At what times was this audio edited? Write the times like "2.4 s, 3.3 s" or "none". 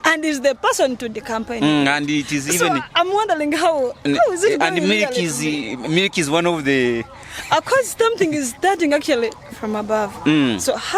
none